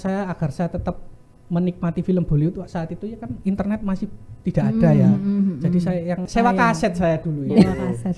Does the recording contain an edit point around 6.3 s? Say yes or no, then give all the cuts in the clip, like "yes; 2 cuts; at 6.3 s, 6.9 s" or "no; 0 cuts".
yes; 1 cut; at 6.3 s